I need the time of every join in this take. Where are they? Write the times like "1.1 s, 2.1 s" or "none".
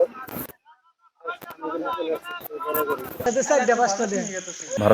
3.3 s